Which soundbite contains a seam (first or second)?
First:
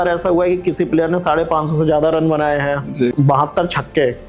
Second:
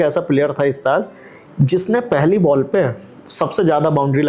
first